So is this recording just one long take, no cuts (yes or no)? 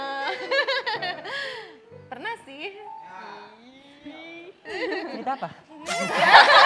no